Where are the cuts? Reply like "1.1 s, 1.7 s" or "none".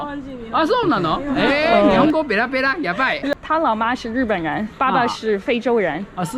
3.3 s